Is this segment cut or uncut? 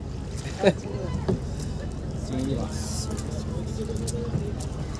uncut